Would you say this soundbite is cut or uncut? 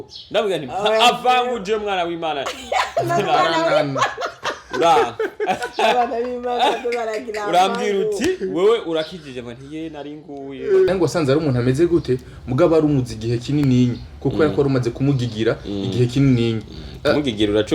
cut